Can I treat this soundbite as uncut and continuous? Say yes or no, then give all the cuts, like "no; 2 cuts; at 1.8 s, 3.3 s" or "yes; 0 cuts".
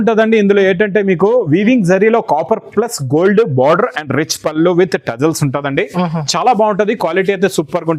yes; 0 cuts